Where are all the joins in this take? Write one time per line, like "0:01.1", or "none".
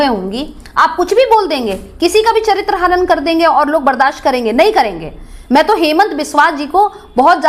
none